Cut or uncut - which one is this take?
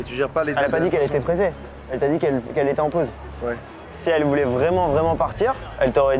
uncut